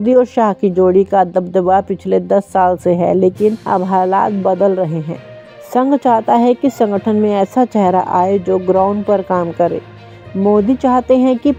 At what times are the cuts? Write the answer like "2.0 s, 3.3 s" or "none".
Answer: none